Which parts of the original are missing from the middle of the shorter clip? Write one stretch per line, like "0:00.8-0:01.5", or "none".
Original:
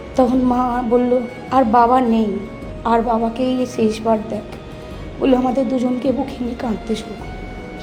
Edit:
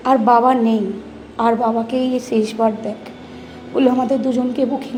none